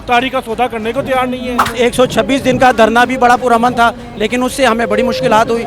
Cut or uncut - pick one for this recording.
cut